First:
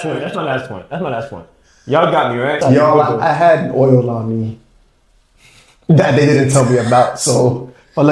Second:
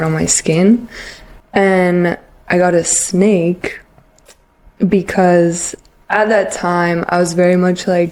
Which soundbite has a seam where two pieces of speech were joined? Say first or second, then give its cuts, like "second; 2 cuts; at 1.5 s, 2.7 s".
first; 1 cut; at 2.6 s